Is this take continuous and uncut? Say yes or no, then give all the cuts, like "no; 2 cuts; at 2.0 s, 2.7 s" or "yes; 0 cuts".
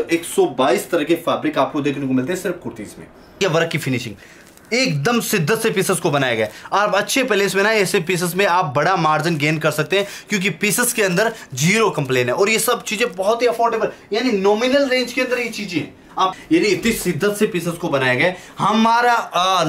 no; 2 cuts; at 3.4 s, 16.3 s